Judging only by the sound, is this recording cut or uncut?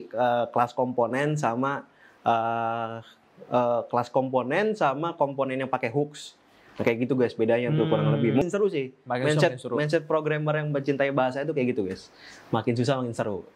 cut